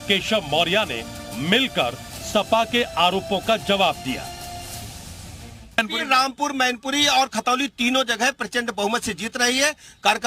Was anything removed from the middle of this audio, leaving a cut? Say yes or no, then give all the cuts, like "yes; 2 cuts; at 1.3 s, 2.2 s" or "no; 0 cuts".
no; 0 cuts